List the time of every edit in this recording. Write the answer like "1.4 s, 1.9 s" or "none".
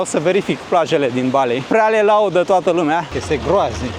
1.6 s, 3.1 s